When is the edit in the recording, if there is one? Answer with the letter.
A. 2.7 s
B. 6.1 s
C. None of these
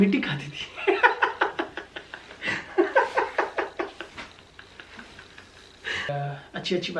B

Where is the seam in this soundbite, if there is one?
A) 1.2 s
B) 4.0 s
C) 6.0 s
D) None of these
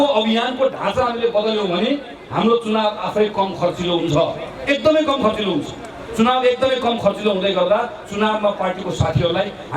D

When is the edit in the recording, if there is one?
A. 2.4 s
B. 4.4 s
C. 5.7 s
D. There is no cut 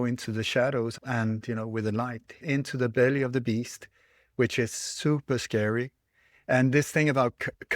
A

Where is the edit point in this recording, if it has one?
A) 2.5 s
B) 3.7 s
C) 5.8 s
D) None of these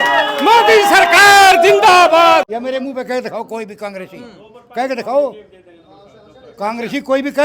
A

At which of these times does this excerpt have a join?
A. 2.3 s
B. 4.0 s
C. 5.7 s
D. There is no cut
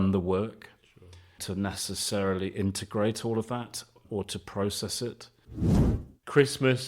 C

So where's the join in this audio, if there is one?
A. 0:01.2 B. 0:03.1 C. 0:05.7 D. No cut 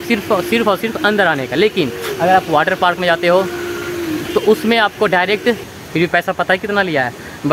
C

